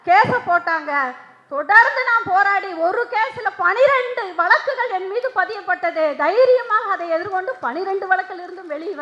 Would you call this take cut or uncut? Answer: uncut